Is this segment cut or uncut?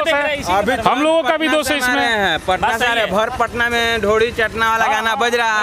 uncut